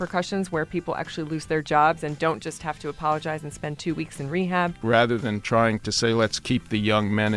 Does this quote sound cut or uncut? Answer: cut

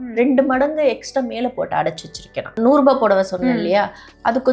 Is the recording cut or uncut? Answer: cut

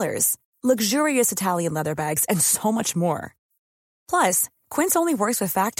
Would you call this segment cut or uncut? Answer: uncut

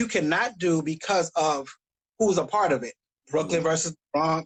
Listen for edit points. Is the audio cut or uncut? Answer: uncut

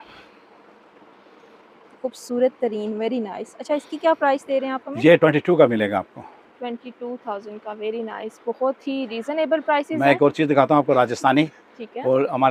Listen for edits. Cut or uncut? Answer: uncut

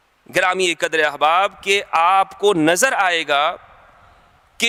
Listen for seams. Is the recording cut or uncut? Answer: uncut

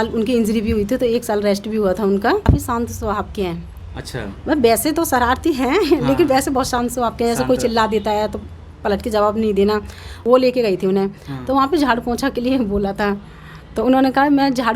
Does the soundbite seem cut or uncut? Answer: cut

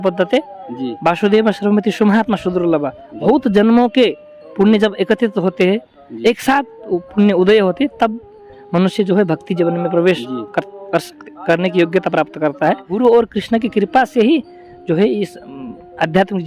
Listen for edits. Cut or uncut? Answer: cut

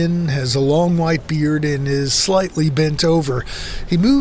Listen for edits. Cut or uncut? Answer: uncut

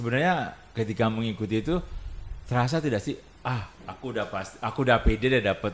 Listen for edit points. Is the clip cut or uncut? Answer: uncut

